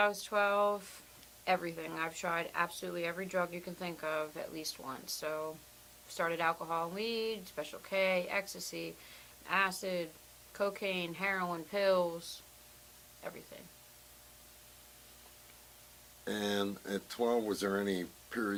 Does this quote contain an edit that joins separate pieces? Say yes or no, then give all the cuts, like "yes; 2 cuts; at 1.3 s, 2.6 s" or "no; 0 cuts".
no; 0 cuts